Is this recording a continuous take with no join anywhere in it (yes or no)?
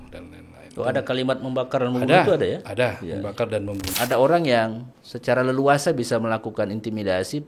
no